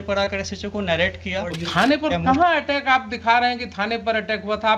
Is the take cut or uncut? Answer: cut